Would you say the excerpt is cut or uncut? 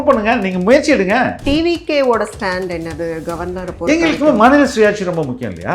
cut